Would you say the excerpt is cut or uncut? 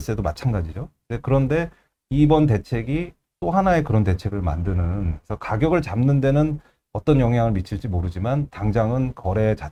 uncut